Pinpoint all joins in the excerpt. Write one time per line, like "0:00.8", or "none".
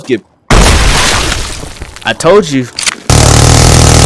0:01.7
0:03.3